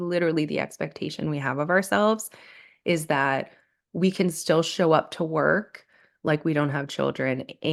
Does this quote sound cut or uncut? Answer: uncut